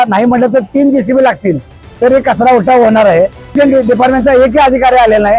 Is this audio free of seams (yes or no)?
no